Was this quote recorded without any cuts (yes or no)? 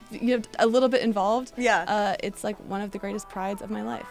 yes